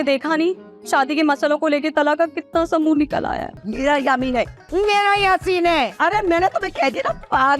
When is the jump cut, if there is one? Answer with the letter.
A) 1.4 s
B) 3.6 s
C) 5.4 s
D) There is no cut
B